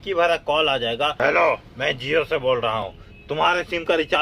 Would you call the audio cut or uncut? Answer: cut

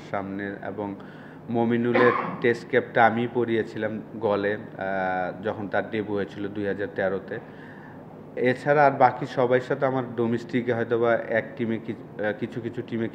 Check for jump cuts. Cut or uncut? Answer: uncut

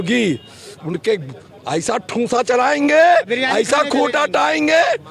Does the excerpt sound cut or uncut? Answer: uncut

